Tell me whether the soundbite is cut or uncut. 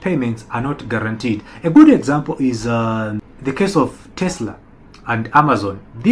cut